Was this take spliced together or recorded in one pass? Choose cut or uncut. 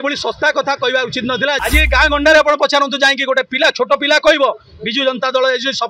cut